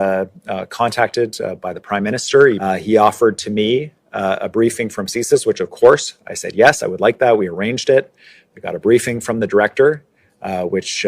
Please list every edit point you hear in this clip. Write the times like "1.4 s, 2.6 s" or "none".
2.6 s